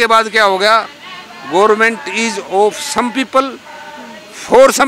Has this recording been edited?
no; 0 cuts

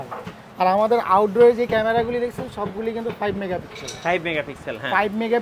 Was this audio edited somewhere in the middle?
no; 0 cuts

